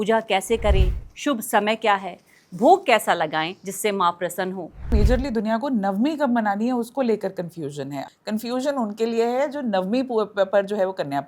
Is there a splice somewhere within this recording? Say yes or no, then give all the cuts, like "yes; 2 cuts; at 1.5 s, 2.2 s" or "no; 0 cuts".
yes; 2 cuts; at 4.9 s, 8.0 s